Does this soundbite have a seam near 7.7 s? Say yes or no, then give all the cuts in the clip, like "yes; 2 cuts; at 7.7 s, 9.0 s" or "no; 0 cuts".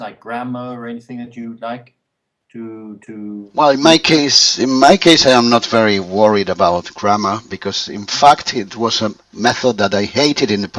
no; 0 cuts